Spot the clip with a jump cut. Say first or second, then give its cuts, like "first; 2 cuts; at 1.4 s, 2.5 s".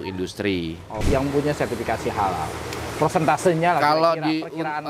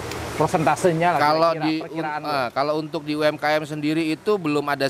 first; 1 cut; at 1.0 s